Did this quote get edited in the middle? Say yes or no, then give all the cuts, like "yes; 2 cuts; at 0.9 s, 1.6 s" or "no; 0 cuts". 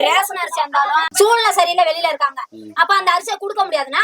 yes; 1 cut; at 1.1 s